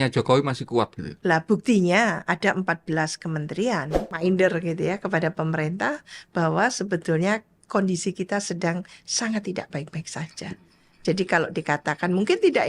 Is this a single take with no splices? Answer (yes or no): no